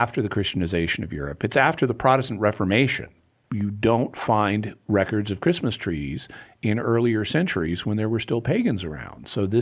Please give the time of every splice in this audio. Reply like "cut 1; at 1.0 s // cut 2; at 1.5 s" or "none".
cut 1; at 3.2 s